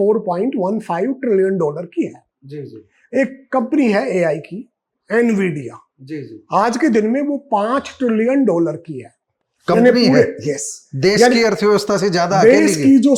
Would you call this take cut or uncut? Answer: uncut